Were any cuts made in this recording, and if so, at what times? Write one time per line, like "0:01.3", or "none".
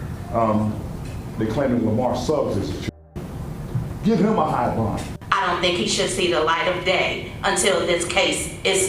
0:05.1